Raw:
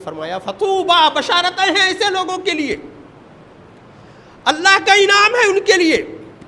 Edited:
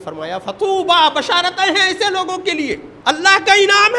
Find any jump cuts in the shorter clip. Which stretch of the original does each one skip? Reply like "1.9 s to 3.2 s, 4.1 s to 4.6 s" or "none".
2.9 s to 4.3 s